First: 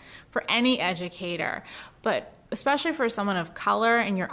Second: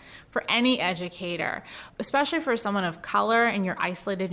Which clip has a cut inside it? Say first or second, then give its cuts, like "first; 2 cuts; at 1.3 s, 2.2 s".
second; 1 cut; at 1.9 s